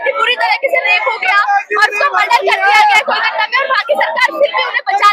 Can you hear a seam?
no; 0 cuts

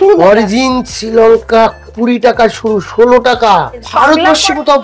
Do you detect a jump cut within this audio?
yes; 1 cut; at 3.9 s

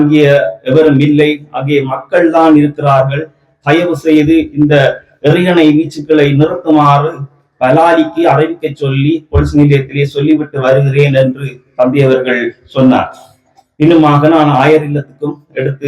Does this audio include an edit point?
no; 0 cuts

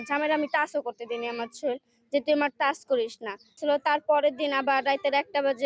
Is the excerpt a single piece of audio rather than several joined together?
no; 1 cut; at 3.6 s

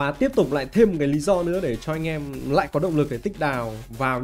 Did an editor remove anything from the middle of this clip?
no; 0 cuts

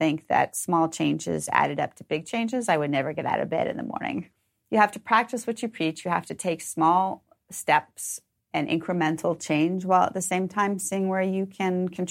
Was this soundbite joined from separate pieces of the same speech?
yes; 2 cuts; at 4.3 s, 8.3 s

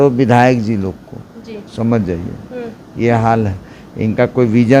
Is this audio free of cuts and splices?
yes; 0 cuts

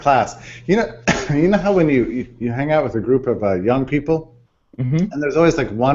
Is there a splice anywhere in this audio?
yes; 1 cut; at 1.6 s

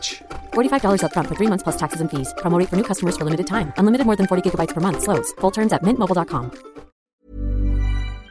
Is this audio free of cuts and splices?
no; 1 cut; at 7.1 s

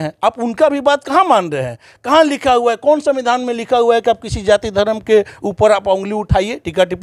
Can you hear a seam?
no; 0 cuts

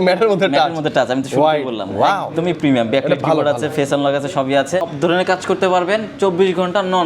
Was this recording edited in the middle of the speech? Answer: yes; 1 cut; at 4.9 s

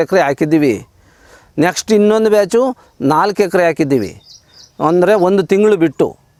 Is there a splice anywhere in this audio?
no; 0 cuts

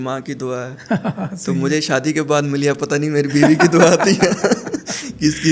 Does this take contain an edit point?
no; 0 cuts

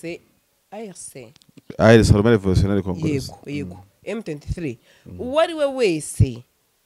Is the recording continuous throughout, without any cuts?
yes; 0 cuts

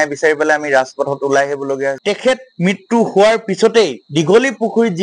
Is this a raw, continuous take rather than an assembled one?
no; 1 cut; at 1.9 s

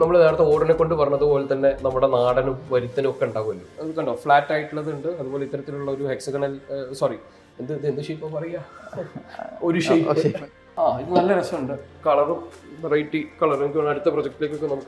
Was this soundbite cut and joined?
yes; 2 cuts; at 3.7 s, 10.3 s

